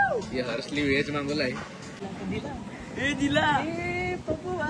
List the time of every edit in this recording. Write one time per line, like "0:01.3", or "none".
0:01.9